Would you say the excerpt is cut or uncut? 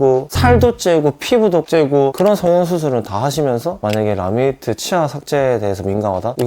uncut